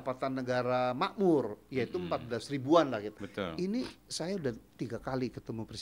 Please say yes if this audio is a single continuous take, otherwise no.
no